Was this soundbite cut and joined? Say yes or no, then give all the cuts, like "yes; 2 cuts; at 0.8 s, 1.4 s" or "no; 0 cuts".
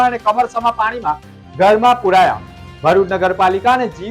no; 0 cuts